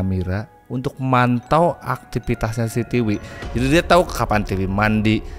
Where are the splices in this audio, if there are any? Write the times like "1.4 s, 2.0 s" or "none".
none